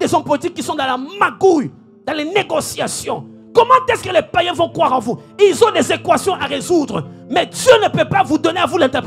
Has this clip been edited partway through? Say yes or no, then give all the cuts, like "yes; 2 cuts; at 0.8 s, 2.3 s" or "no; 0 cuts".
no; 0 cuts